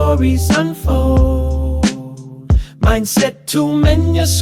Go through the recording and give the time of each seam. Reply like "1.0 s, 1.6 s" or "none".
none